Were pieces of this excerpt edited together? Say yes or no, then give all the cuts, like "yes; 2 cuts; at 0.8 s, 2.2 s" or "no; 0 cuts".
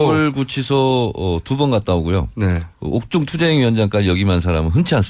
no; 0 cuts